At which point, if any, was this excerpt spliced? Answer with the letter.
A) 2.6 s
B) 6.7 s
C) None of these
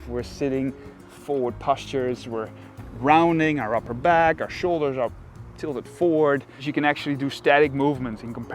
B